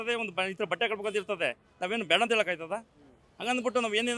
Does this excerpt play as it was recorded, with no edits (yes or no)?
yes